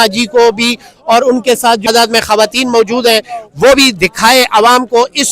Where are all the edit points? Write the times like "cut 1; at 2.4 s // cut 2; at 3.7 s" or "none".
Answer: cut 1; at 1.9 s